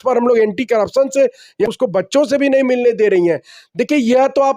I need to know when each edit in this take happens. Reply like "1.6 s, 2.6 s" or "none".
1.7 s